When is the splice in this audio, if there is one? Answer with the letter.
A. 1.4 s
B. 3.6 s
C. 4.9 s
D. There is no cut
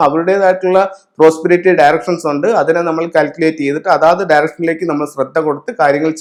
D